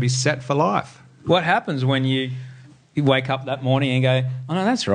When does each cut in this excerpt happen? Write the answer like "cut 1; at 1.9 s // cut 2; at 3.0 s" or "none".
none